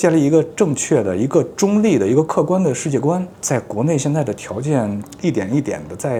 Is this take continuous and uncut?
yes; 0 cuts

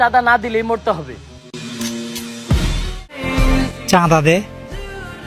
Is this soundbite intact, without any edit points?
no; 1 cut; at 3.3 s

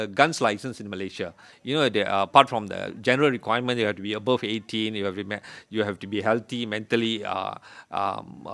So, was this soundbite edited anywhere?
no; 0 cuts

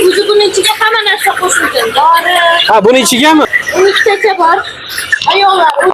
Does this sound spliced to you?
yes; 1 cut; at 3.4 s

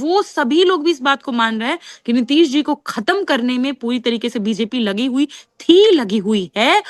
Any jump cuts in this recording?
no; 0 cuts

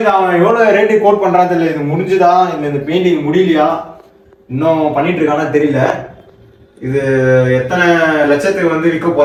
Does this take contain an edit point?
no; 0 cuts

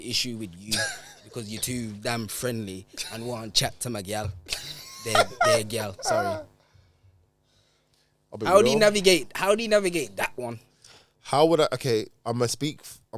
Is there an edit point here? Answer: no; 0 cuts

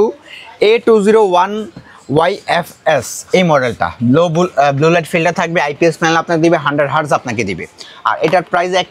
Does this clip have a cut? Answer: no; 0 cuts

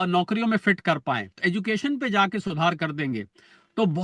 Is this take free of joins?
no; 1 cut; at 1.4 s

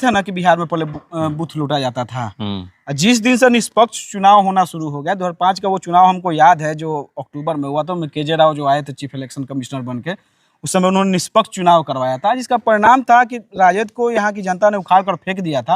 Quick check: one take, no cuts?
yes; 0 cuts

